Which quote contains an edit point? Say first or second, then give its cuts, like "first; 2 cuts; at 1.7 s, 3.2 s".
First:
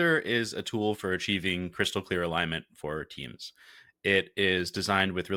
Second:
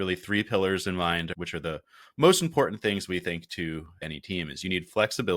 second; 2 cuts; at 1.4 s, 4.0 s